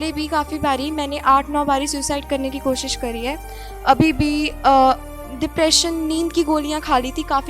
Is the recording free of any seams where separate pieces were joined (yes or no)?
yes